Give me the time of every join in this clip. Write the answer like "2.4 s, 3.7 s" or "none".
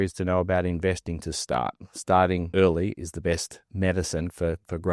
2.5 s, 3.7 s